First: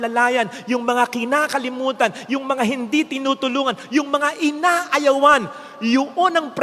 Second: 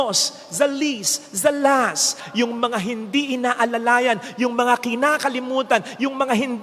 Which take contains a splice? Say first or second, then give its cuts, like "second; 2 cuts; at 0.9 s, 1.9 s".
second; 1 cut; at 2.2 s